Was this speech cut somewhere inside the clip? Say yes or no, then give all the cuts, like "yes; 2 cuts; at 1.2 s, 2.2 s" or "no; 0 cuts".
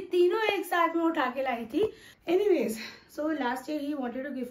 yes; 1 cut; at 2.1 s